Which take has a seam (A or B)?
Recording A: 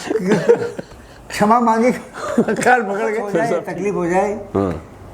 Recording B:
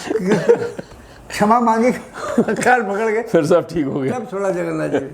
A